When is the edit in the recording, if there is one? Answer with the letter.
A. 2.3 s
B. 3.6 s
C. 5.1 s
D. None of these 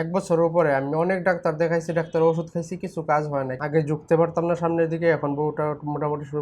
B